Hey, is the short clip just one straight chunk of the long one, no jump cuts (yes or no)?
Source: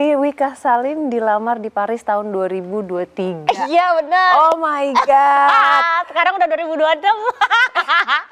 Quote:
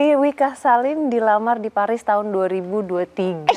yes